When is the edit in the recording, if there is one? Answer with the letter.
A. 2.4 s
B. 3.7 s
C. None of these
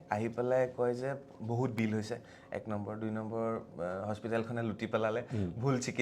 C